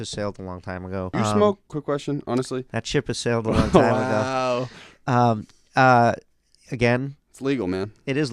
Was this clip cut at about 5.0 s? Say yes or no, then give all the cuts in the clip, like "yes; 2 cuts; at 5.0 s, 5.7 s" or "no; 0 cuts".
no; 2 cuts; at 1.1 s, 1.7 s